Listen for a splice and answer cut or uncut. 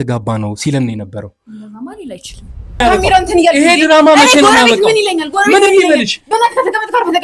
cut